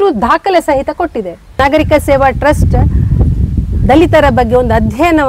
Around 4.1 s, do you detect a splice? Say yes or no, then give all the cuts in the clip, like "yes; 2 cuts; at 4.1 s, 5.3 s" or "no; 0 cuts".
no; 1 cut; at 1.7 s